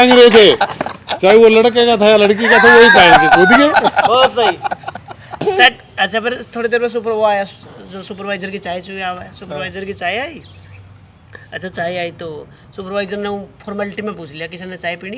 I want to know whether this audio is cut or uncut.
cut